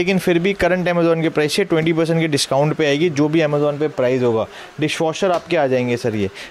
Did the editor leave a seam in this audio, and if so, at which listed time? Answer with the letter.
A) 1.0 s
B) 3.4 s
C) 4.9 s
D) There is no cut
D